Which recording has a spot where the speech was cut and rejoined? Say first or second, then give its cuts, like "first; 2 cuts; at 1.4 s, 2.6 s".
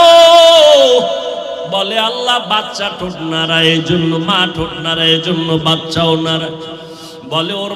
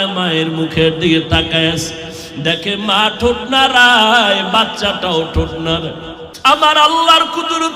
second; 1 cut; at 6.2 s